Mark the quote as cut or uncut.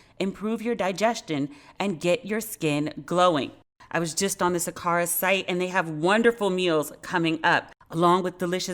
cut